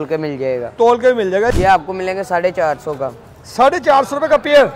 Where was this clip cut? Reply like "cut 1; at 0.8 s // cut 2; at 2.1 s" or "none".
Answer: cut 1; at 1.5 s